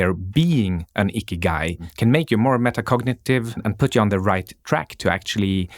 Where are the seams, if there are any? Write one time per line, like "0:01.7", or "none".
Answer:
0:01.9
0:03.6